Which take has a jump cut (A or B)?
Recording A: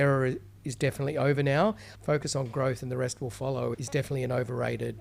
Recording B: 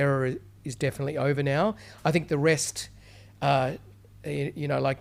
A